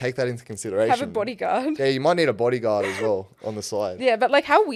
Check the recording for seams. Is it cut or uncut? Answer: uncut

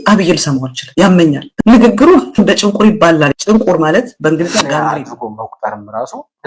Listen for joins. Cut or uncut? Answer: cut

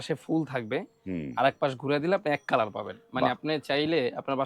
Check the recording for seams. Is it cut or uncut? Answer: uncut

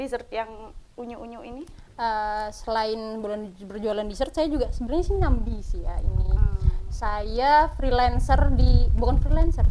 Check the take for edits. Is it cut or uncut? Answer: uncut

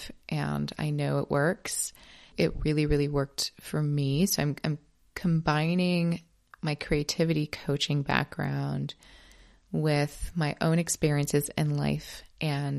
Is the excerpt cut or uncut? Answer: uncut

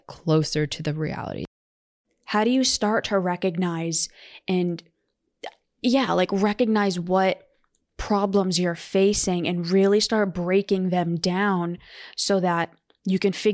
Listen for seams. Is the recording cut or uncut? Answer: cut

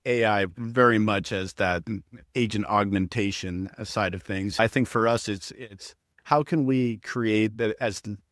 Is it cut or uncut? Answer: cut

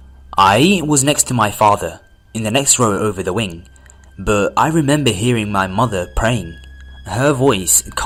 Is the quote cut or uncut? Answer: uncut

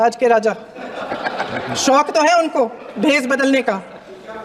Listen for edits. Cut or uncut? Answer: uncut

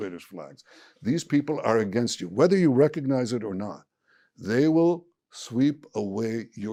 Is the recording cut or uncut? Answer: uncut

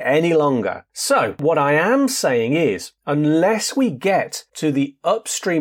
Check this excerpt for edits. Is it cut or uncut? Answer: cut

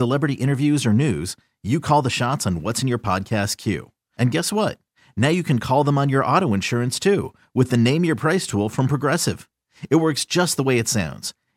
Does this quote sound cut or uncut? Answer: uncut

